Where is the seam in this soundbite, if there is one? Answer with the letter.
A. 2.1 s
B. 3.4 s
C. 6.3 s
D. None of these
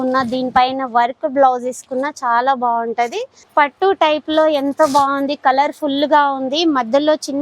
B